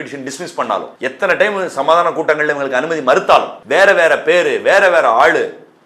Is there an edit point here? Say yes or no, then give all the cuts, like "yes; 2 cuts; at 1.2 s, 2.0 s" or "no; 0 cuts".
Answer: yes; 2 cuts; at 0.9 s, 3.6 s